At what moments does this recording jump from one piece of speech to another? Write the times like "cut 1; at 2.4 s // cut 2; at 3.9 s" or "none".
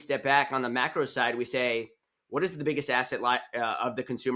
none